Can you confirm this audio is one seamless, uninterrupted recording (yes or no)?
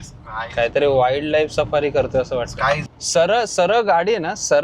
no